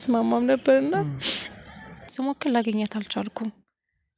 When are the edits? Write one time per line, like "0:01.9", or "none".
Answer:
0:02.1